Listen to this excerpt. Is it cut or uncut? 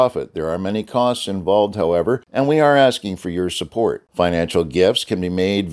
cut